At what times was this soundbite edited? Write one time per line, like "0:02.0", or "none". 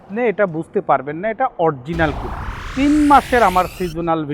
0:02.6